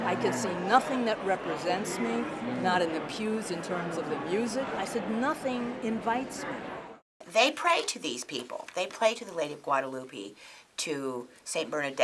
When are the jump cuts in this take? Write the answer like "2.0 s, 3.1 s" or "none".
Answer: 4.7 s, 7.1 s